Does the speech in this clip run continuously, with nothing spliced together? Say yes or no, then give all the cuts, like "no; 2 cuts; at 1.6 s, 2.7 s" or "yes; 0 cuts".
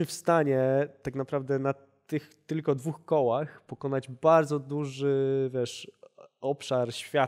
yes; 0 cuts